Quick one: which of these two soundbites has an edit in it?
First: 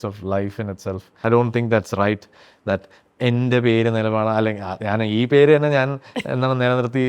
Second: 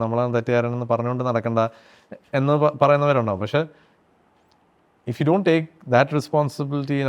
first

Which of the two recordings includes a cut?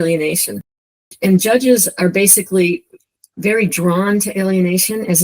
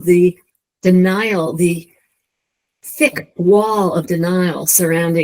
first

